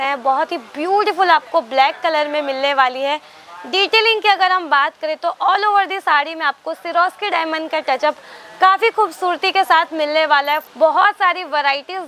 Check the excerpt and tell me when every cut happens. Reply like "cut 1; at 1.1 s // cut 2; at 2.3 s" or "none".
cut 1; at 10.7 s